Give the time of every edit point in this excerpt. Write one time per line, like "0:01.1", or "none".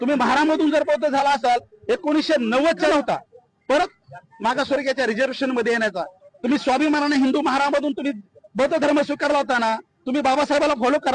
0:02.9